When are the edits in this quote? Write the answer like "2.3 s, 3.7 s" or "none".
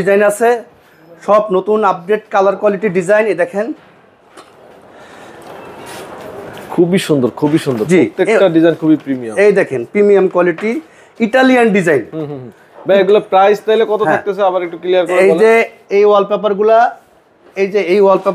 none